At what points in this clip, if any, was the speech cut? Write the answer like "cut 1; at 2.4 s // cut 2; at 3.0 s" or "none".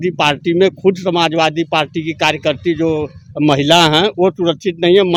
none